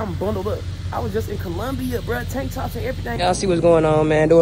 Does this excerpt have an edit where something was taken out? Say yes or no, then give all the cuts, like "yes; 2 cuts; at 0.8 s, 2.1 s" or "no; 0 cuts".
yes; 1 cut; at 3.2 s